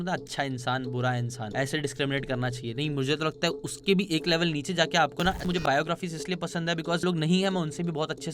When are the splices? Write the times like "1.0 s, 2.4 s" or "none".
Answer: 1.4 s, 5.6 s, 7.0 s